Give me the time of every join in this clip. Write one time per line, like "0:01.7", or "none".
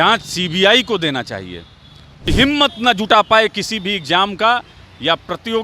0:02.3

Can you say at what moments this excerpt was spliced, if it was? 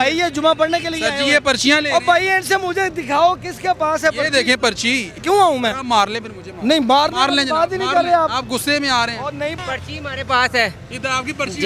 0:05.2
0:09.6

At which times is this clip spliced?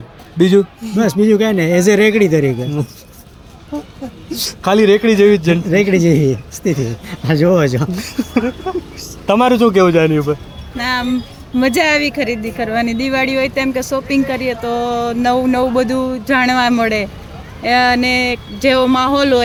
none

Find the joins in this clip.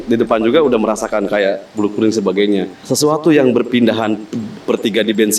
0:02.8

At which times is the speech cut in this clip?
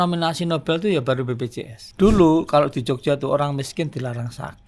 0:01.8

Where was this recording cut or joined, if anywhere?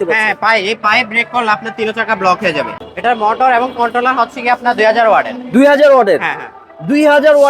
0:02.8

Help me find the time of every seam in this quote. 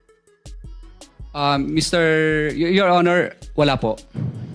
0:01.4

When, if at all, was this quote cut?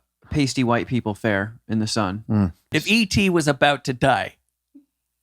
0:02.7

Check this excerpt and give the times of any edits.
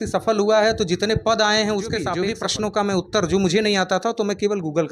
0:02.2

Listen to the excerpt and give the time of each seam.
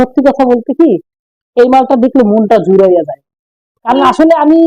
none

